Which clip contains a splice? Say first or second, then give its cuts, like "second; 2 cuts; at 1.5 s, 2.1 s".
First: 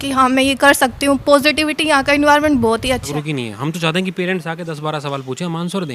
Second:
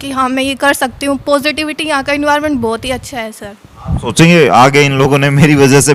first; 1 cut; at 3.1 s